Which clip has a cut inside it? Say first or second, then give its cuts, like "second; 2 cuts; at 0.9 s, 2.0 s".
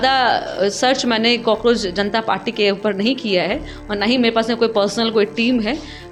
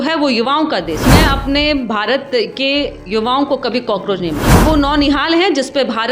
second; 2 cuts; at 1.1 s, 4.6 s